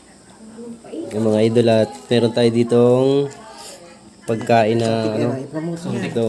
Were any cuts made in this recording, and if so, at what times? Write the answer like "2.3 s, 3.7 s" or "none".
1.1 s